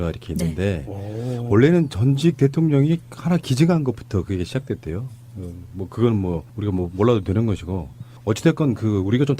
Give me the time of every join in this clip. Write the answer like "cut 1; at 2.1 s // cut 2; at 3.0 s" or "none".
cut 1; at 5.1 s